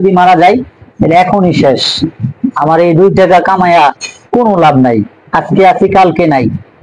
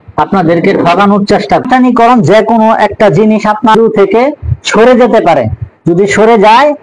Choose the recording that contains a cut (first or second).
second